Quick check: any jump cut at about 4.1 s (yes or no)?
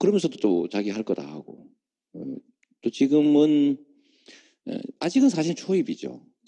yes